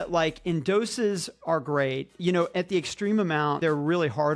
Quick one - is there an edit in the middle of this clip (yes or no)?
yes